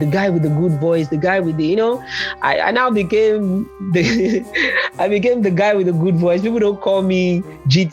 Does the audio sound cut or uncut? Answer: uncut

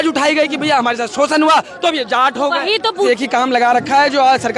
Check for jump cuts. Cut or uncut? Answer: cut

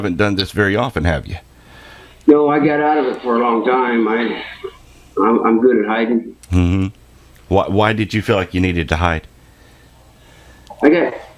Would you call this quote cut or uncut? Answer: cut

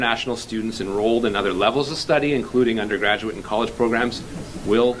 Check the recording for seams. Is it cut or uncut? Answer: uncut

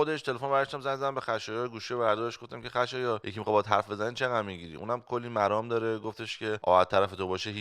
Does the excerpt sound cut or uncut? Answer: cut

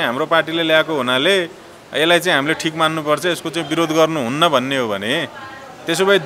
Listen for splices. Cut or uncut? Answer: uncut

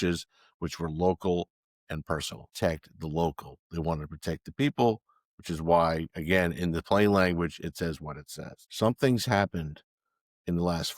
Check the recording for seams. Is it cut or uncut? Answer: cut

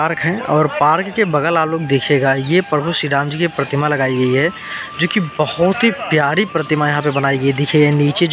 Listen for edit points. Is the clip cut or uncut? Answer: uncut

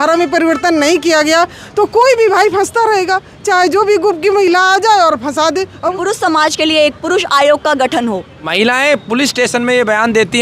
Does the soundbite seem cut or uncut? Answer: cut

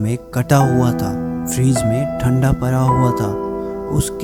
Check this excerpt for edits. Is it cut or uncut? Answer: uncut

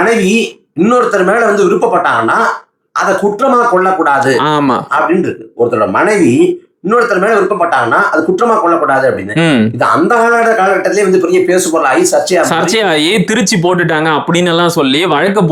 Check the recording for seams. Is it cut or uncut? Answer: uncut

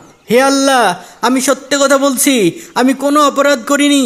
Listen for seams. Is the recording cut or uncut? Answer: uncut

